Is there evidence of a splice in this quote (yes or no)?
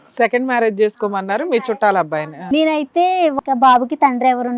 yes